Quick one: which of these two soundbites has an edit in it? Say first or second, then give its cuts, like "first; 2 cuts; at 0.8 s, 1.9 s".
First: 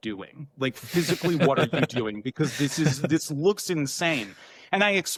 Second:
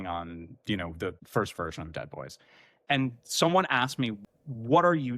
second; 3 cuts; at 1.2 s, 2.8 s, 4.2 s